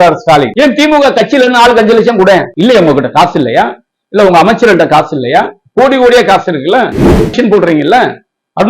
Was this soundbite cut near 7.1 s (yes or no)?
yes